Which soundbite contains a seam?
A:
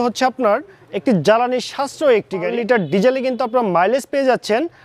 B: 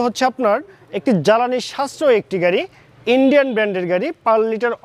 A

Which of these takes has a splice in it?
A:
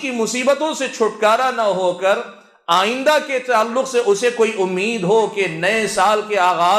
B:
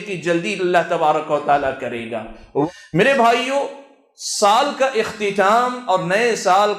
B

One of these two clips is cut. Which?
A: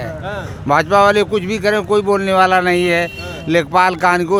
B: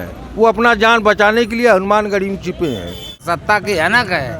B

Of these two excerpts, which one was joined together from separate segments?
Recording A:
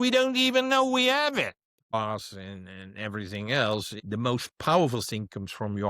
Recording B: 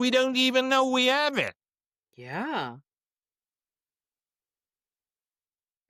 A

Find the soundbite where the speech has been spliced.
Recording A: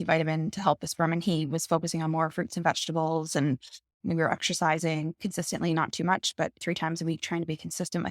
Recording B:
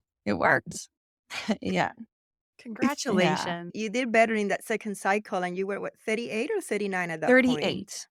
A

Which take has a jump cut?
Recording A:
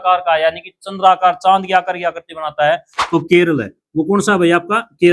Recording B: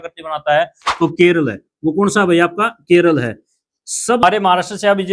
B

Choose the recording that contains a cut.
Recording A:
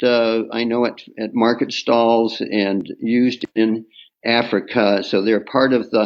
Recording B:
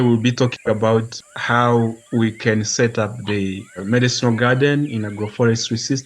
B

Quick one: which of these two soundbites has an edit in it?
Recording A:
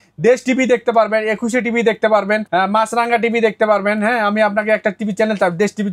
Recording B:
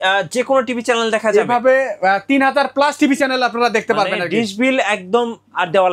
A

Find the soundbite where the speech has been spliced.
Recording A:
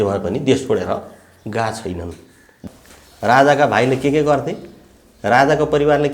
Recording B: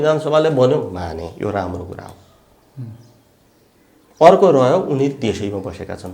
A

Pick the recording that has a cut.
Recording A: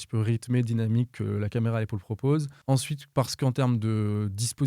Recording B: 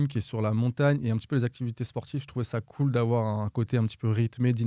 A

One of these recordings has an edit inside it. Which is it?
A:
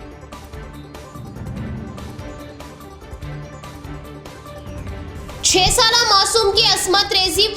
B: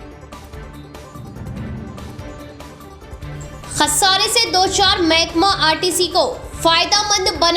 A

